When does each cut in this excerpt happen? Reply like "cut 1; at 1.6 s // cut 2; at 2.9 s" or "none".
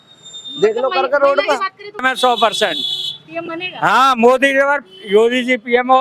cut 1; at 2.0 s